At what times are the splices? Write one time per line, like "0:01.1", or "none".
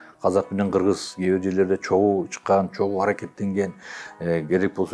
none